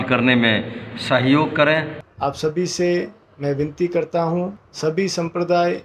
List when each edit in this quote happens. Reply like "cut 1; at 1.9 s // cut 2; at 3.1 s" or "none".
cut 1; at 2.0 s // cut 2; at 4.6 s